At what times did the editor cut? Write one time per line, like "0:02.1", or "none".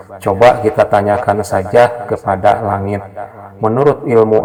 none